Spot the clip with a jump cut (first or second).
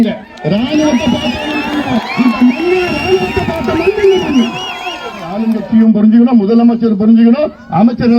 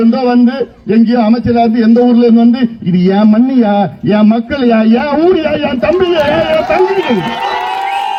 first